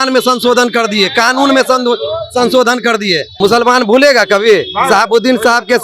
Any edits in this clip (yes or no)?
yes